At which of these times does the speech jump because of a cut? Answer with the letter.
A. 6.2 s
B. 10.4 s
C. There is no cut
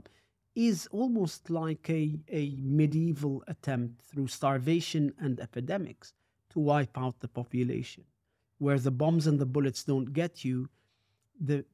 C